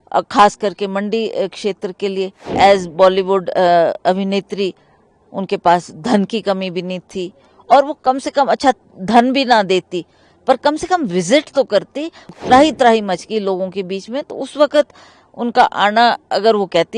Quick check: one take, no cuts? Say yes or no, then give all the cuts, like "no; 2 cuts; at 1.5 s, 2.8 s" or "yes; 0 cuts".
no; 2 cuts; at 2.5 s, 12.3 s